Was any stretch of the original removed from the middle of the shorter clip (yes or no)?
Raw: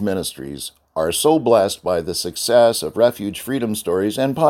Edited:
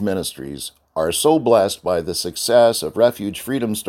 no